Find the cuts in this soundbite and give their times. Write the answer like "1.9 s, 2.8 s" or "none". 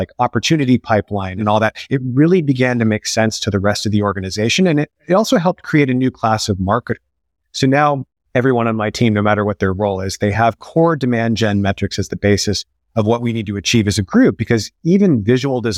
1.4 s, 8.2 s